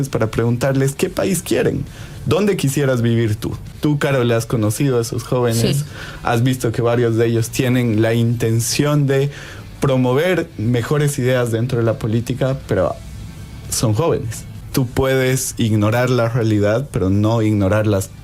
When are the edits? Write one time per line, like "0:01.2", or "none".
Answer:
0:03.6
0:14.6